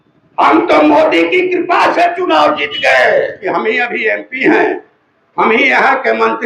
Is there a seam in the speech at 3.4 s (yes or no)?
yes